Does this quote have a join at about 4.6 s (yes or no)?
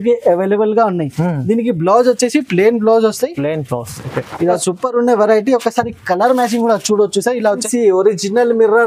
yes